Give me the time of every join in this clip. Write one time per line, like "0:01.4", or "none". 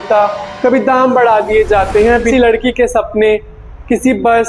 0:02.3